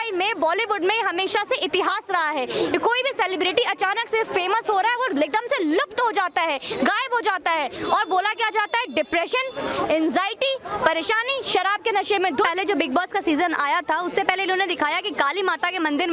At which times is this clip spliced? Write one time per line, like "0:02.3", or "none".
0:12.5